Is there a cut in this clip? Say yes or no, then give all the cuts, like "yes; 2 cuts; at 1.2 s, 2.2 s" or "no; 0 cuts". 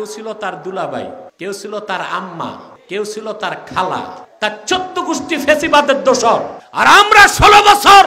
yes; 4 cuts; at 1.3 s, 2.7 s, 4.2 s, 6.6 s